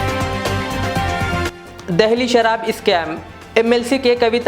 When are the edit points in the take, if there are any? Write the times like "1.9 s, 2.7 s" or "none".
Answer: none